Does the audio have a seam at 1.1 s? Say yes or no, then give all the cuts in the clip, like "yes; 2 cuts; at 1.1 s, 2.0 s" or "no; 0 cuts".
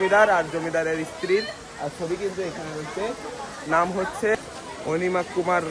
no; 1 cut; at 4.3 s